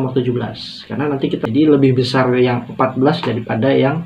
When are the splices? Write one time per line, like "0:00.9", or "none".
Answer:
0:01.4